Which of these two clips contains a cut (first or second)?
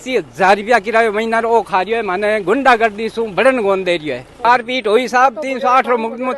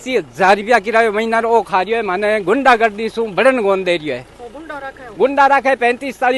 first